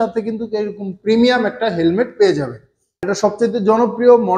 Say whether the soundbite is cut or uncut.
cut